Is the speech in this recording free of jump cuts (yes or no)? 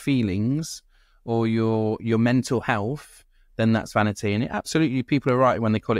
yes